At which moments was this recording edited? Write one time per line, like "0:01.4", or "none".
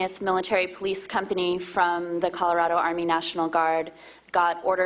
0:02.7